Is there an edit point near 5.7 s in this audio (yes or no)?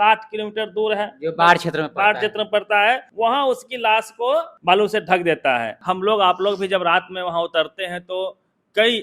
yes